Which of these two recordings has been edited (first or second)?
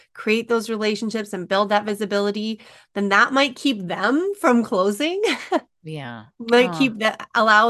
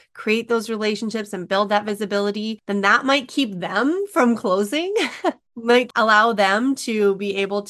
second